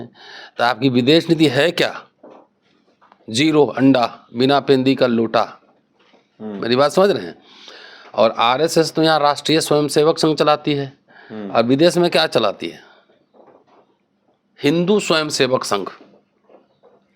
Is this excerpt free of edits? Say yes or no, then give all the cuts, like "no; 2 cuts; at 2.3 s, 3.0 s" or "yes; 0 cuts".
yes; 0 cuts